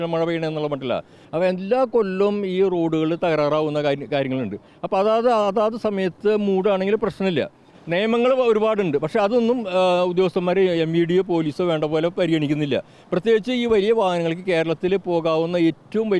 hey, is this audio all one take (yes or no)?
no